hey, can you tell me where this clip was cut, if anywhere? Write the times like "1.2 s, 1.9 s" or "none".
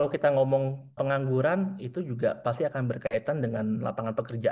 1.0 s